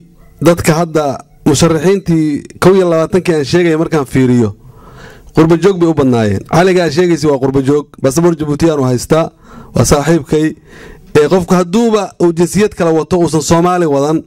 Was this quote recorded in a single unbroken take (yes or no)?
yes